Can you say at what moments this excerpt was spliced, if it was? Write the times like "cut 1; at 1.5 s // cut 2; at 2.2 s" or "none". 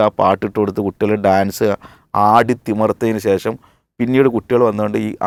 none